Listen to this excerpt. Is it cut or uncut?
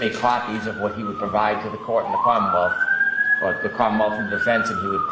uncut